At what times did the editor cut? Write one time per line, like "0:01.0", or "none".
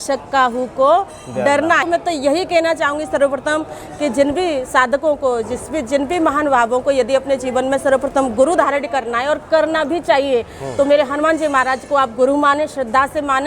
0:01.8